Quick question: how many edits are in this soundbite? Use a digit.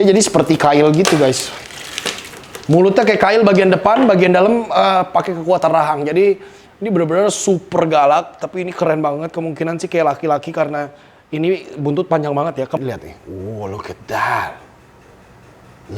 1